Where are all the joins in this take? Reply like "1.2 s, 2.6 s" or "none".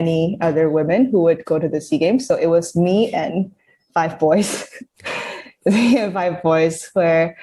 none